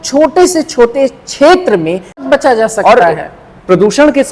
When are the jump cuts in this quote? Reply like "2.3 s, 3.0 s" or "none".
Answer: 2.2 s